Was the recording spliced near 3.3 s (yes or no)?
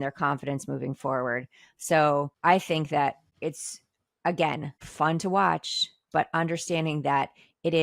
yes